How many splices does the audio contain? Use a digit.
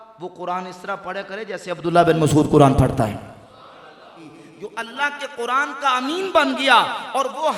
1